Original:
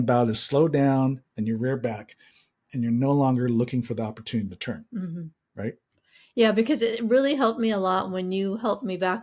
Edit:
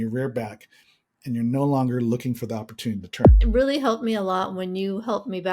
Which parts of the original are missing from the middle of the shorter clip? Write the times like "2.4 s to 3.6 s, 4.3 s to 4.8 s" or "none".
4.9 s to 7.0 s